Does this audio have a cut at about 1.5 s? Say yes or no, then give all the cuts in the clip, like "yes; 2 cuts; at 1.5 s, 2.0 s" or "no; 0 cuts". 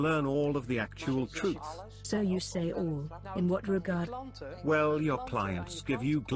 no; 0 cuts